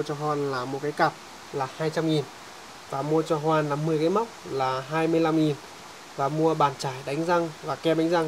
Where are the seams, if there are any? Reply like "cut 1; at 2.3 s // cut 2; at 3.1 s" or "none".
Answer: none